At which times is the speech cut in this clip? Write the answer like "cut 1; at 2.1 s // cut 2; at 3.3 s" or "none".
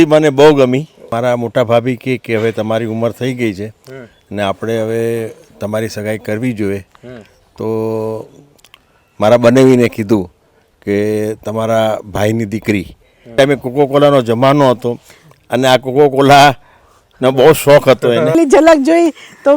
cut 1; at 1.1 s // cut 2; at 13.3 s // cut 3; at 18.3 s